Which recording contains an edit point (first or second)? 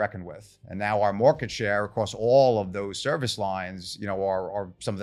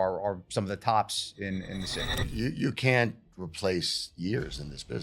second